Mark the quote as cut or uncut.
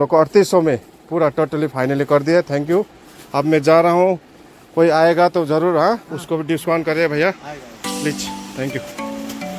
uncut